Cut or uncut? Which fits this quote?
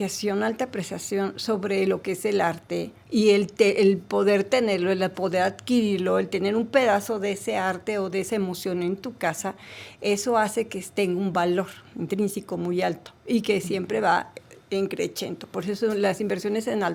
uncut